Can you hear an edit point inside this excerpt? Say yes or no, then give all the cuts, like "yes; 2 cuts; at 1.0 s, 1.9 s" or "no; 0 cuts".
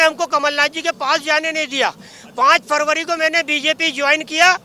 no; 0 cuts